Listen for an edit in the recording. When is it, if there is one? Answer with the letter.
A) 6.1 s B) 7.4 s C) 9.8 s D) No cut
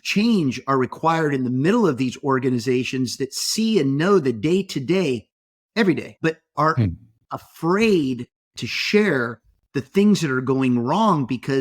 A